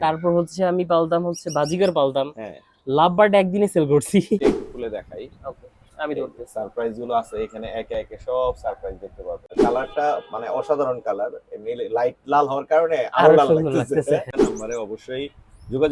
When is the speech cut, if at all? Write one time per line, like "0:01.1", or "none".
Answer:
0:04.4
0:09.6
0:14.3